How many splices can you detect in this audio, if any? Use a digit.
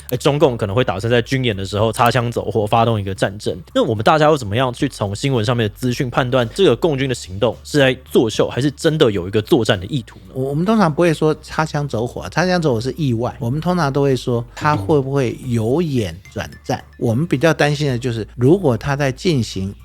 3